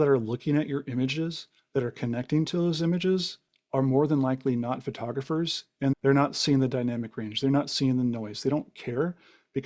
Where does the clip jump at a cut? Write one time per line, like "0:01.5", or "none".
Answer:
0:05.9